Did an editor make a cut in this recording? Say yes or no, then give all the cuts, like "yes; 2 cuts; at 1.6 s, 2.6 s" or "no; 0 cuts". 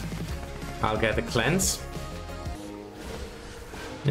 yes; 1 cut; at 2.5 s